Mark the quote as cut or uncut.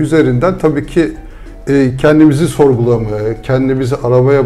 uncut